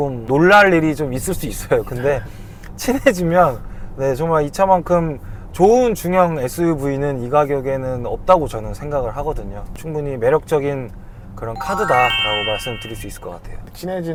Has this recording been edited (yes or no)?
no